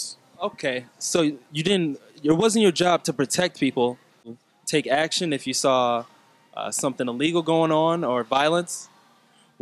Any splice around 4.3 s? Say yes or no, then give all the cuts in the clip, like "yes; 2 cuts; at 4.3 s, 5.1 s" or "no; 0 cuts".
yes; 1 cut; at 4.3 s